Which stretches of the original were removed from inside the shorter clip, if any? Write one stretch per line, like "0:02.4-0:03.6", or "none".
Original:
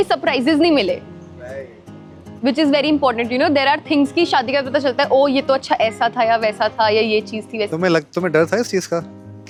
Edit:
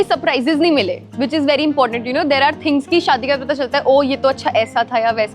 0:01.0-0:02.3